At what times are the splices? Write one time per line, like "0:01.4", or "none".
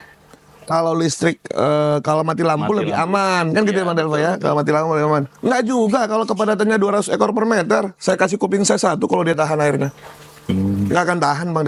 none